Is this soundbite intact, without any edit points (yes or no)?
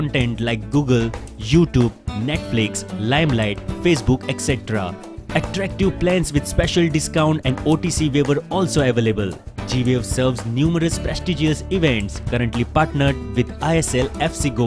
no